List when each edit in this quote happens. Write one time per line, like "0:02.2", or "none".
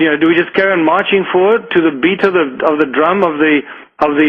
none